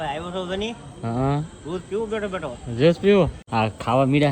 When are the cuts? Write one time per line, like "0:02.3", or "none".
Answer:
0:03.4